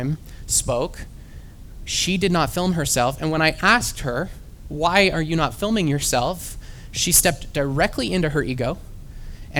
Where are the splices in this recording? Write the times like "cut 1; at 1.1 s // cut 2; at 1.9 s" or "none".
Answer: none